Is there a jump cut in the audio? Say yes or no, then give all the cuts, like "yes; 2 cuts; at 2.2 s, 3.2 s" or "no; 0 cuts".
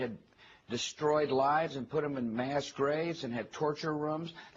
yes; 1 cut; at 3.6 s